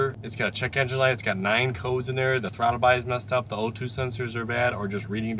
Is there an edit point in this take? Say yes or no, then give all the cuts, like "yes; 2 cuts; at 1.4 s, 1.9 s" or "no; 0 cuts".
no; 0 cuts